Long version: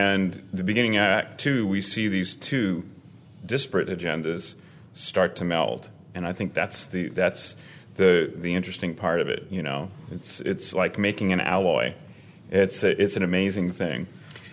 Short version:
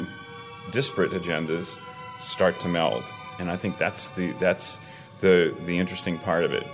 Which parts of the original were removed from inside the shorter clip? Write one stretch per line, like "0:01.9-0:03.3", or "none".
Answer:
none